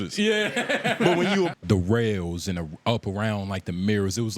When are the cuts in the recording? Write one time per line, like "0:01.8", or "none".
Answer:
0:01.5